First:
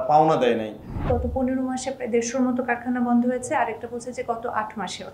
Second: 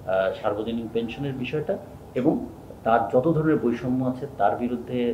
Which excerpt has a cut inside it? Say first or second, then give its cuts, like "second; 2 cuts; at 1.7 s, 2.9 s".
first; 1 cut; at 1.0 s